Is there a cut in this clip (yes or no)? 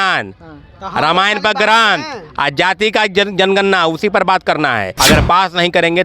yes